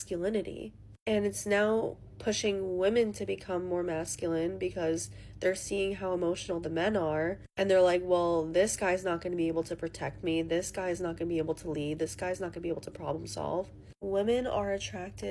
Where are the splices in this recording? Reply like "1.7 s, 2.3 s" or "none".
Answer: 4.7 s